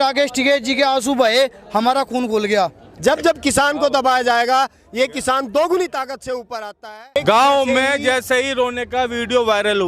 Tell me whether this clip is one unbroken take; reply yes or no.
no